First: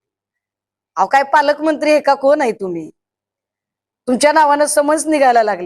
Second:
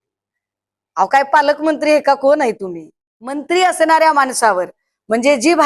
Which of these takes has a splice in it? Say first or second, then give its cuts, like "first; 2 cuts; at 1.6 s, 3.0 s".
second; 1 cut; at 3.4 s